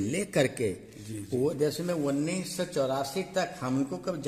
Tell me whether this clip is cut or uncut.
uncut